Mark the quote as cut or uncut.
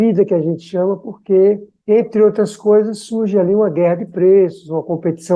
uncut